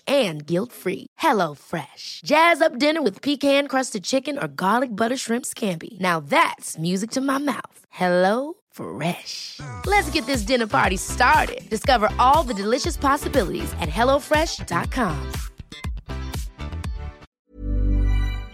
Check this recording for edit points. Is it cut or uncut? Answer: cut